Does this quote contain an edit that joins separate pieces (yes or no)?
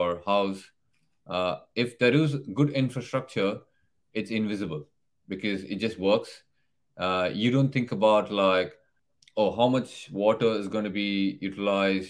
no